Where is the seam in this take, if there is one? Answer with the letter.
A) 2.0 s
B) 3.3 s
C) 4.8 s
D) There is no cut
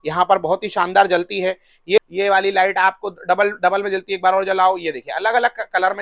A